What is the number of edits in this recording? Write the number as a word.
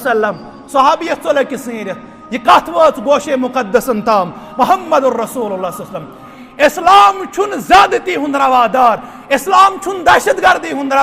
one